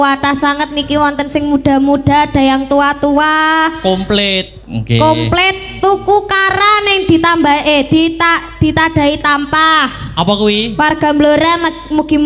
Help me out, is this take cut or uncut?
uncut